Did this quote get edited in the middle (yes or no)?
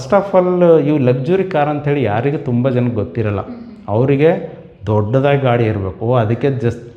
no